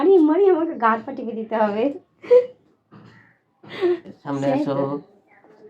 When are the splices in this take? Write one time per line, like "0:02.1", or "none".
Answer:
0:04.1